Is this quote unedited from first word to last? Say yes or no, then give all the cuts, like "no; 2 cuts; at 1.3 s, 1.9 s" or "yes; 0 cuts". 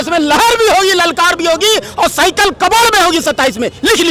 yes; 0 cuts